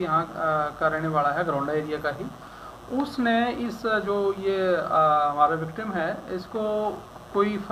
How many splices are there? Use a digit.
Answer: 0